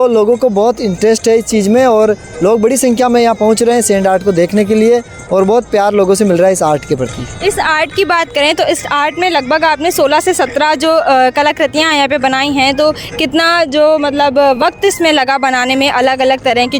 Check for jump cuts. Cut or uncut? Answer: uncut